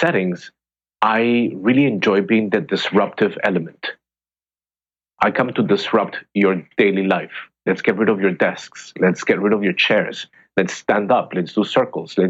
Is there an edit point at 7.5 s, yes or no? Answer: no